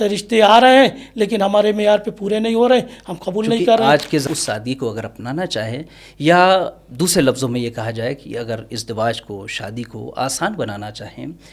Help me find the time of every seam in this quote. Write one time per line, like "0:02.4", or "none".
0:04.2